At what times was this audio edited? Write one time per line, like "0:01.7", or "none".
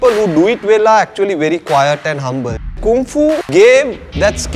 0:02.8